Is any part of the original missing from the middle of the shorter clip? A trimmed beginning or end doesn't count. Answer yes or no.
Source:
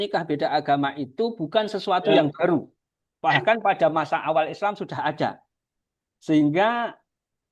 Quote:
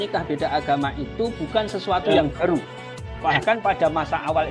no